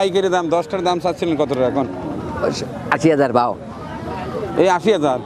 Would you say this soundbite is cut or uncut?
uncut